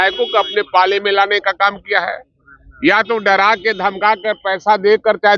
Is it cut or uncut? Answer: uncut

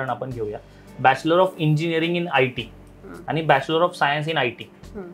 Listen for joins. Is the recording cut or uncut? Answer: uncut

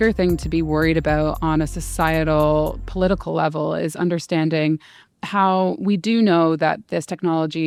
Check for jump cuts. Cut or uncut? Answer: uncut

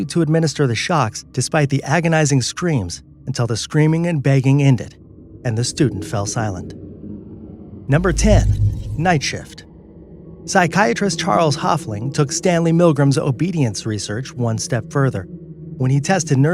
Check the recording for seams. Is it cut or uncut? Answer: uncut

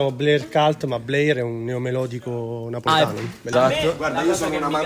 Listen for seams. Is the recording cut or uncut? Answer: cut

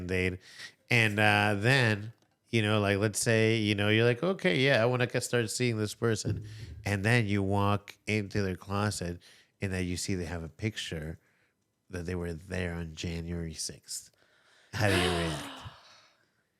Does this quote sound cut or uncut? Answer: uncut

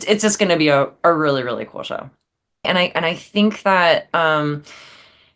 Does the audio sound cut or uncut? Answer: cut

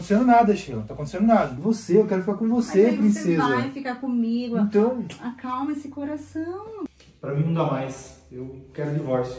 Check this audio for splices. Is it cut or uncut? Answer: cut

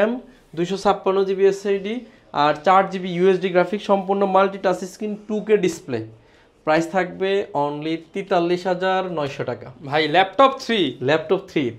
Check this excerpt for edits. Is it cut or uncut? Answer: uncut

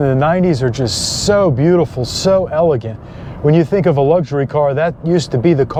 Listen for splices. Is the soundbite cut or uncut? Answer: uncut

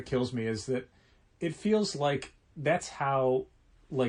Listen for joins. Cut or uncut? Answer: uncut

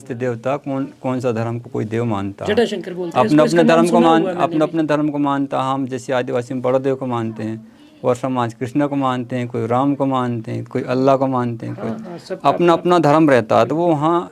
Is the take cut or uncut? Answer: uncut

